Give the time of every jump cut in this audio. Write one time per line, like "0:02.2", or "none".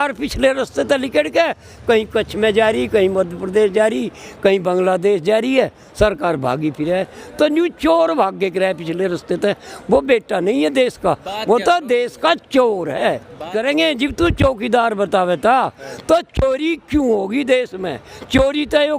0:13.5